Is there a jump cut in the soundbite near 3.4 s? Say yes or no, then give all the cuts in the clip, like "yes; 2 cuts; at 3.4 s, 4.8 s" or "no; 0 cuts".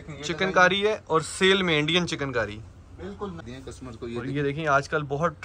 yes; 1 cut; at 3.4 s